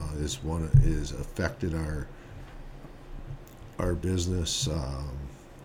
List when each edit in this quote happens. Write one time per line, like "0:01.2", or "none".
none

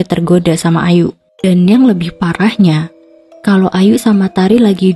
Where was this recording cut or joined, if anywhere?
0:01.3

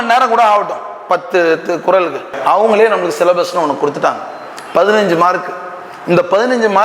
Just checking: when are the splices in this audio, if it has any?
0:02.3

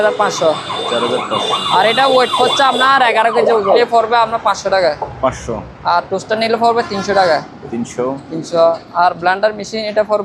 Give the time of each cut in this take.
0:03.8

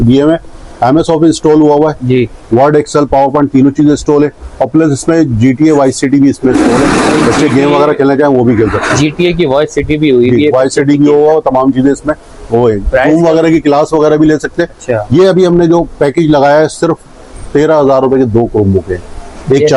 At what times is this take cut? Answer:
none

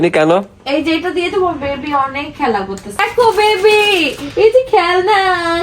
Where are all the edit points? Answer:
0:03.0

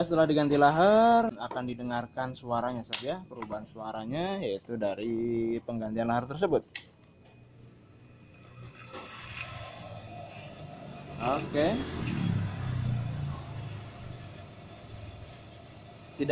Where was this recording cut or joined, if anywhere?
0:01.3

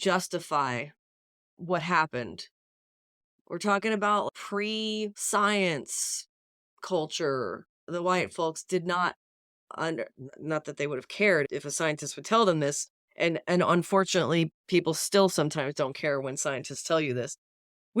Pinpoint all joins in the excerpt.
0:05.2
0:07.9
0:11.5

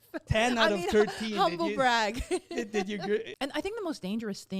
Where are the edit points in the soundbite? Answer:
0:03.3

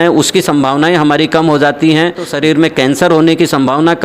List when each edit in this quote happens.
0:02.3

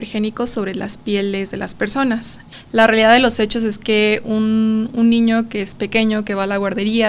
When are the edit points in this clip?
0:02.4

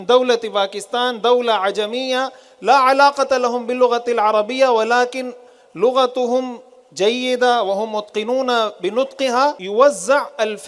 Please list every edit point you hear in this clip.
0:09.6

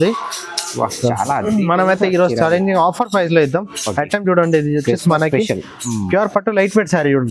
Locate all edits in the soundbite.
none

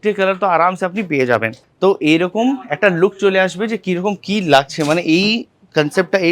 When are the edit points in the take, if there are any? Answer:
0:01.6

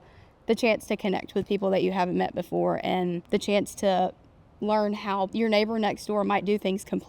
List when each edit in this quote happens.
0:03.2
0:05.3

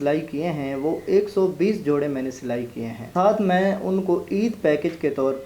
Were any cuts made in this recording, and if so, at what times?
0:03.1

